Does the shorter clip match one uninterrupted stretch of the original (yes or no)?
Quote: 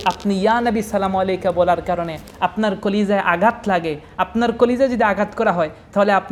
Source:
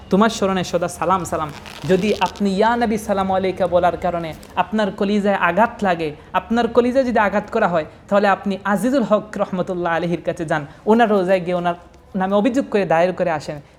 yes